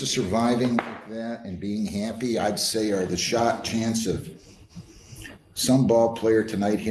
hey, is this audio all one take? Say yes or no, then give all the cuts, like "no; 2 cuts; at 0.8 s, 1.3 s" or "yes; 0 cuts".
yes; 0 cuts